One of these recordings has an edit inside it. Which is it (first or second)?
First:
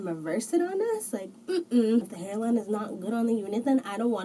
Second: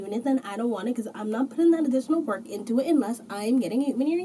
first